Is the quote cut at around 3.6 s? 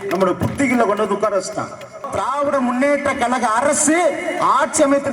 no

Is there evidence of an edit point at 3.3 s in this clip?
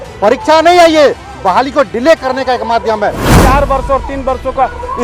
yes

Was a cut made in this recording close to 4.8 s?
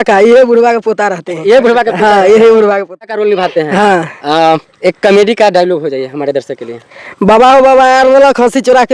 no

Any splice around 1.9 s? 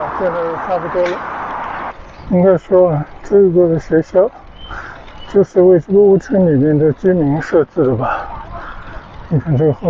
yes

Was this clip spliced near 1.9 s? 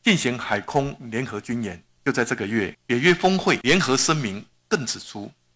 yes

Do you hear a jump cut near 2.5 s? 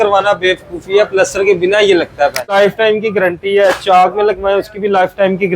yes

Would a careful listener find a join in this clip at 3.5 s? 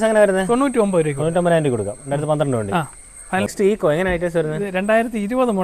yes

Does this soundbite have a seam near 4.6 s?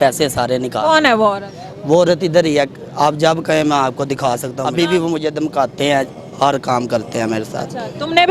yes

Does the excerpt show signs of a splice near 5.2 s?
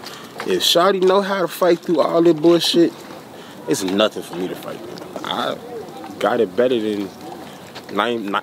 yes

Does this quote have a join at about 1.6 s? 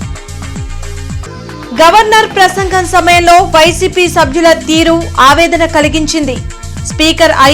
yes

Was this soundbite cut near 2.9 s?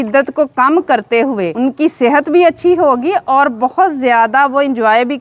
no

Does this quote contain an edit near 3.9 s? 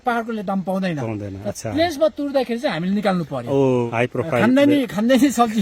yes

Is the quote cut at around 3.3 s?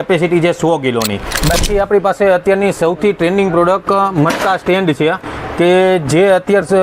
no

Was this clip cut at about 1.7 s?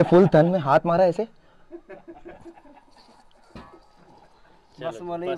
no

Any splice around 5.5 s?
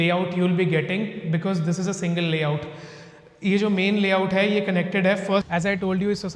yes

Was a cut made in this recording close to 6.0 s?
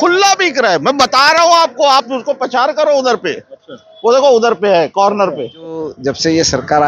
yes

